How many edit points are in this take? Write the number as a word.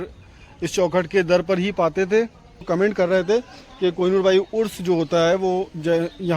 one